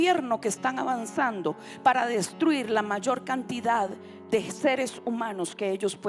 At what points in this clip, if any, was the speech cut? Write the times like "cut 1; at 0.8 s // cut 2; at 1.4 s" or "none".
none

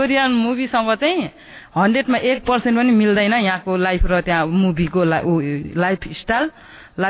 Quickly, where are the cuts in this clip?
none

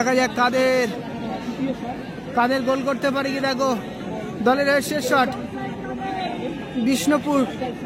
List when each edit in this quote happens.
none

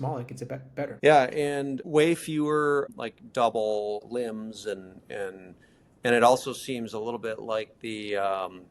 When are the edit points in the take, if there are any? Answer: cut 1; at 0.9 s // cut 2; at 1.8 s // cut 3; at 2.9 s // cut 4; at 4.0 s

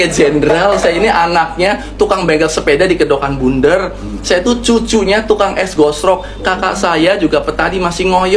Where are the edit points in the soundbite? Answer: none

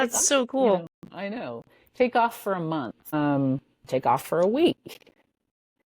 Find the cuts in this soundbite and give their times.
cut 1; at 3.1 s

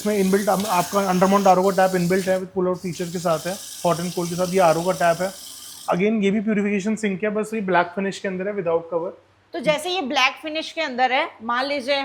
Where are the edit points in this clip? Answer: none

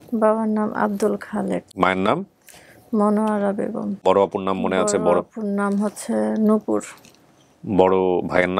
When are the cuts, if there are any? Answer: cut 1; at 1.7 s // cut 2; at 4.0 s

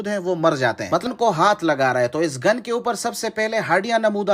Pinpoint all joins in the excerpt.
cut 1; at 1.1 s

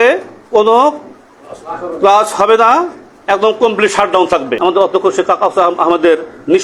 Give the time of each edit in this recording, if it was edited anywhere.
cut 1; at 4.6 s

